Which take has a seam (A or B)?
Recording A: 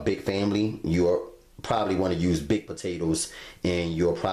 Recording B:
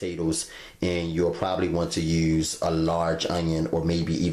A